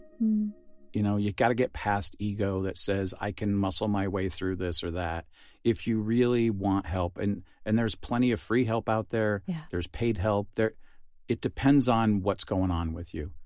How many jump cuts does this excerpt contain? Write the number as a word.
zero